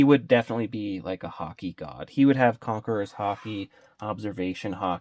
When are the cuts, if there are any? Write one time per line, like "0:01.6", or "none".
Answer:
none

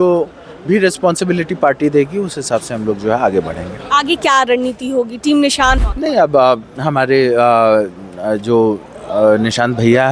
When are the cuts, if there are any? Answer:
0:05.9

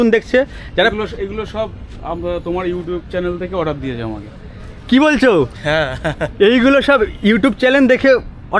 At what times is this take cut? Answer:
none

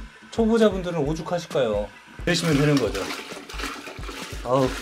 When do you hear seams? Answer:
0:02.3

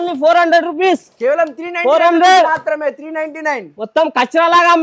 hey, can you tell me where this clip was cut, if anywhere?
none

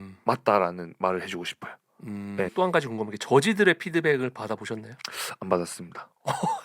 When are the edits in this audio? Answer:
0:02.5

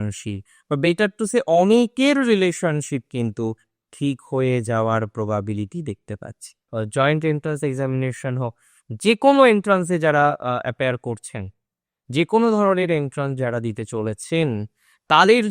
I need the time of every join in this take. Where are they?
0:06.7

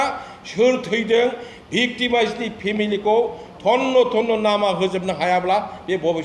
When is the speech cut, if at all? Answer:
none

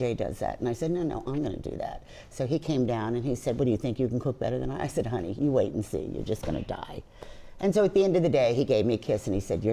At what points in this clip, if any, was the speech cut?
none

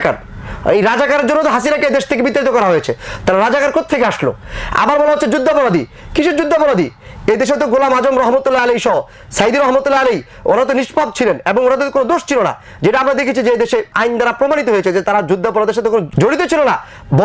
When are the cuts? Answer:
0:13.9
0:16.1

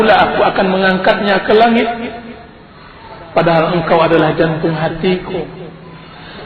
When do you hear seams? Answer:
0:04.5

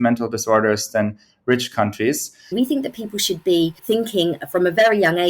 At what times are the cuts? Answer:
0:02.5
0:03.8

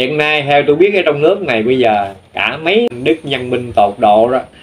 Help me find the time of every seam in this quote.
0:02.8

